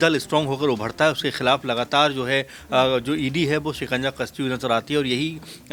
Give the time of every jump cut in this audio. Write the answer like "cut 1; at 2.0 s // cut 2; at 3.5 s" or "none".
none